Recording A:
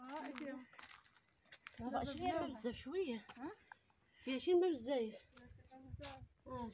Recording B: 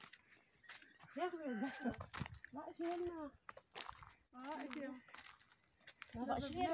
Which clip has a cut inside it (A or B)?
B